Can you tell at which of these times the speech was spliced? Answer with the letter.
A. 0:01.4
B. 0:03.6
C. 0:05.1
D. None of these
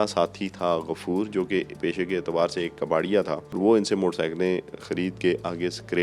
B